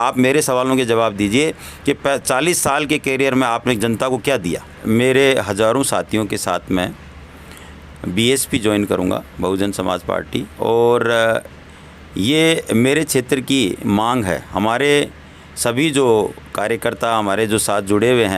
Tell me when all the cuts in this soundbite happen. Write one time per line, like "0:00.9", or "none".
0:04.8